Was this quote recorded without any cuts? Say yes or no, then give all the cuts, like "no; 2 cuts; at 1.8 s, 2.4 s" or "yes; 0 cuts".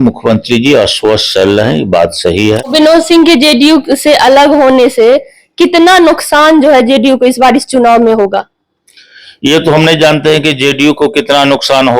no; 1 cut; at 2.3 s